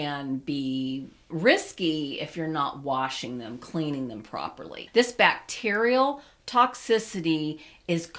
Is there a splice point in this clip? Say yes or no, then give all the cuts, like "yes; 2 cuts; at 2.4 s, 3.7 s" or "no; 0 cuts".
yes; 1 cut; at 4.7 s